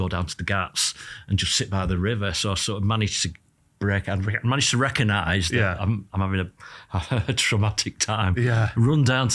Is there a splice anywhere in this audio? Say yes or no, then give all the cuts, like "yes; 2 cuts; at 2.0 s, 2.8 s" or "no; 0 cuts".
no; 0 cuts